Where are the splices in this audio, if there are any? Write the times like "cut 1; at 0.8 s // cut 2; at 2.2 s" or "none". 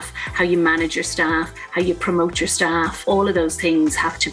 cut 1; at 3.1 s